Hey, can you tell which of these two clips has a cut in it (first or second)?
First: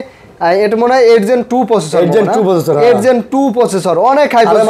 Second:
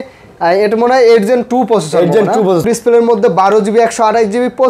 second